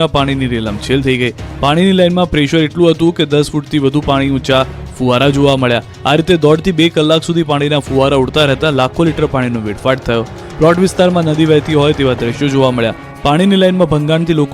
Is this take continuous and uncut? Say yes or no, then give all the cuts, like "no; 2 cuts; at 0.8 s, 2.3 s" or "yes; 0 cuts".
no; 1 cut; at 1.7 s